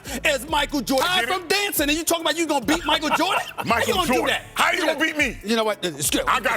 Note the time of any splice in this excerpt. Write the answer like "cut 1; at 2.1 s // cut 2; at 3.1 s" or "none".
cut 1; at 1.0 s